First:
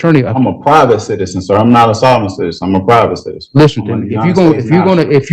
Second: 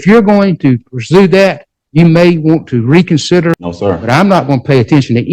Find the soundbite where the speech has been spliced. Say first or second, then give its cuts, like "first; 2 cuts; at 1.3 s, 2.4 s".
second; 1 cut; at 3.7 s